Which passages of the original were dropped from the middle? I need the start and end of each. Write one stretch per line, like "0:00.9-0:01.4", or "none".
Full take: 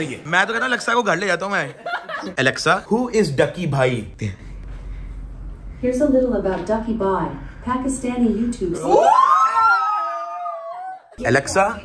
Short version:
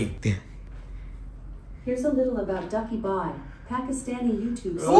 none

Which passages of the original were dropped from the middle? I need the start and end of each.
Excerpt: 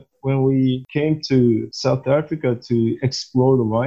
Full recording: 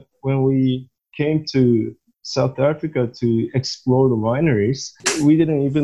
0:00.9-0:01.1
0:02.0-0:02.2

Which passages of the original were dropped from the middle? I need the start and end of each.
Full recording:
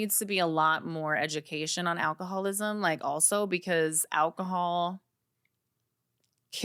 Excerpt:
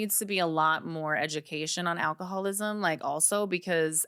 none

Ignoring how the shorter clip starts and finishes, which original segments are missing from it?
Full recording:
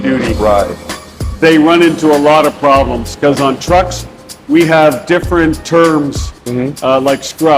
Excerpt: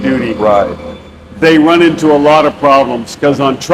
none

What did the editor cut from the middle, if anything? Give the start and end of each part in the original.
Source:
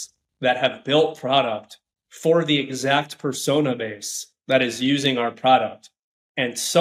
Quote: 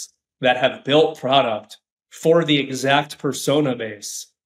none

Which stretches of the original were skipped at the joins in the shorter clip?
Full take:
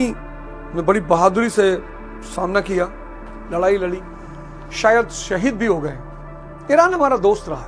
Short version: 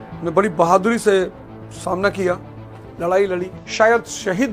0:04.1-0:04.6

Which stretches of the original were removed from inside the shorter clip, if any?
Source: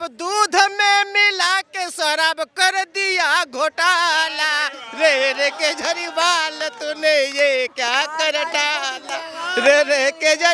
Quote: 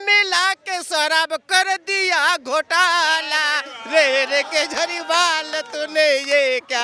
none

